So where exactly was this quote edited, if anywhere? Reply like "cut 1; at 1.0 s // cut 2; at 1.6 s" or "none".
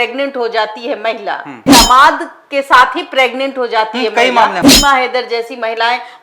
cut 1; at 1.7 s // cut 2; at 4.7 s